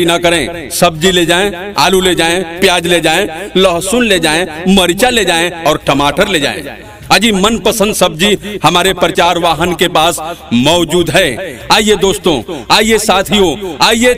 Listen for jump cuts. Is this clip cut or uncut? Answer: uncut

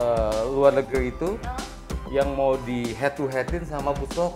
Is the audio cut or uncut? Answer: uncut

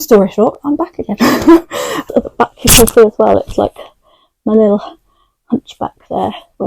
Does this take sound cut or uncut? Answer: cut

